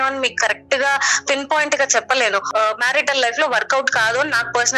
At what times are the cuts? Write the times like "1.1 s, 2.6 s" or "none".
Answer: 2.5 s